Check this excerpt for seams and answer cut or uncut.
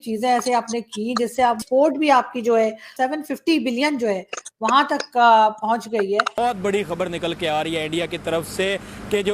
cut